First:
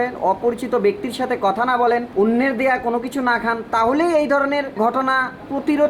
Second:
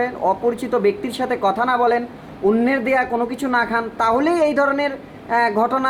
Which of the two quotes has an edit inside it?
first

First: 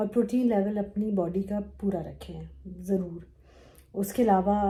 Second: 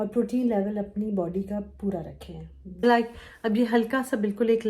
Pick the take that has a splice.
second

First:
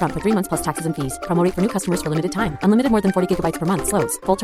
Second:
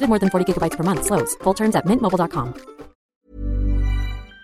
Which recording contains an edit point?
second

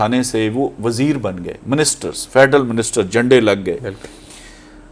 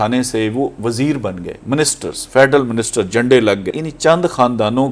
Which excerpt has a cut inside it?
second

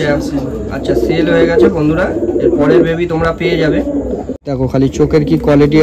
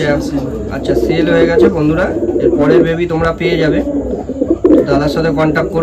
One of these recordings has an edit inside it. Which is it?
first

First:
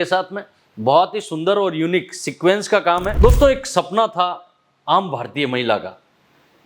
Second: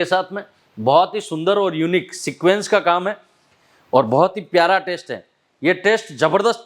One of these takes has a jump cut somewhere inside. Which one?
first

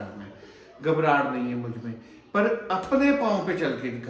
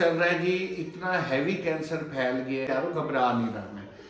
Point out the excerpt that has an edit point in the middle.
second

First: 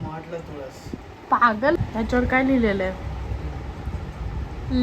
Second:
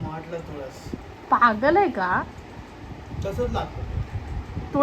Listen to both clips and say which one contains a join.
first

